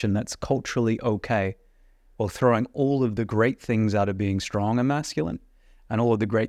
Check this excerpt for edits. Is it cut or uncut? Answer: uncut